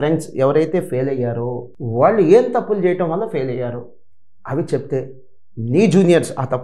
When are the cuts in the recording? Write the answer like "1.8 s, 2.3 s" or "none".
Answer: none